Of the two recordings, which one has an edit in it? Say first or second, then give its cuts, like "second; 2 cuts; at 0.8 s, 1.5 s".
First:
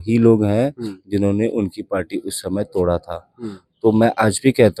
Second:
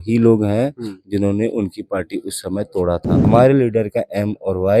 second; 1 cut; at 3.1 s